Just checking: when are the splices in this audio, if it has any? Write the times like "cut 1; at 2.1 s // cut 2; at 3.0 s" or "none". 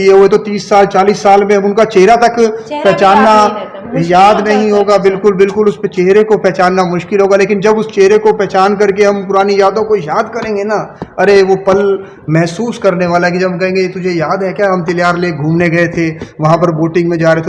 none